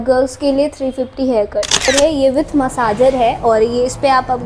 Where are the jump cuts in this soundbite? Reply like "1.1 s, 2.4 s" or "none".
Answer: 1.9 s